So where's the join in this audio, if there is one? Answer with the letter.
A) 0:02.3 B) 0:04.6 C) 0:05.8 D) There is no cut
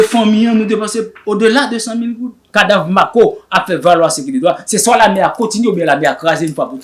A